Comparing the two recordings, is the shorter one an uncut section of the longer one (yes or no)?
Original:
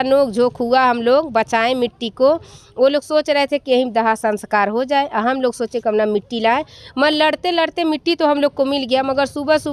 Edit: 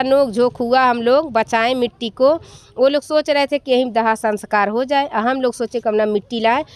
yes